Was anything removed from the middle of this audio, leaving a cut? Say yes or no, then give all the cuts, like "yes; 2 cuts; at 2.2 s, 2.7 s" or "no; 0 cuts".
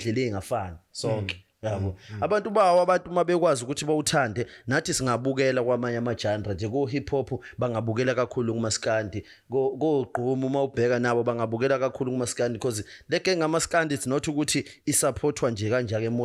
no; 0 cuts